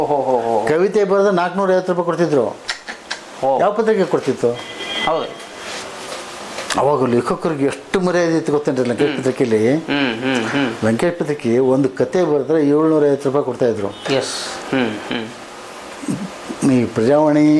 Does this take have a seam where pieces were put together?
no; 0 cuts

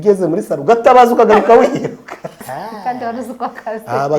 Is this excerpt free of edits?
no; 1 cut; at 2.4 s

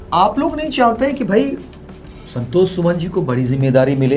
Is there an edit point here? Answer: no; 0 cuts

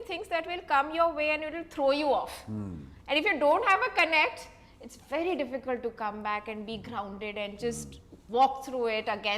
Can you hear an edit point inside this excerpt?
no; 0 cuts

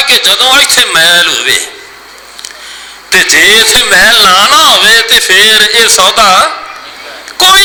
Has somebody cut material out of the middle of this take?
no; 0 cuts

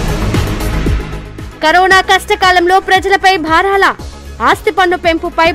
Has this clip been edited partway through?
yes; 1 cut; at 1.0 s

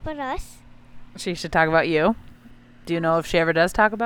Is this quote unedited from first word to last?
yes; 0 cuts

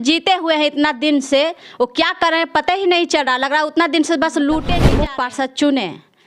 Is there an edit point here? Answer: yes; 1 cut; at 4.9 s

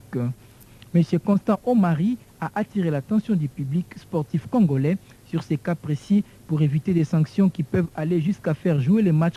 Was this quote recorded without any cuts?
yes; 0 cuts

